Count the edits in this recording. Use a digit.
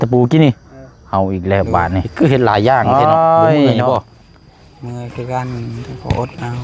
3